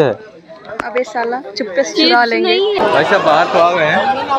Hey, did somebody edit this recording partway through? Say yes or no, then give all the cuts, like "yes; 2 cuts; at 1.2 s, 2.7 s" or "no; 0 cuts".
yes; 1 cut; at 2.8 s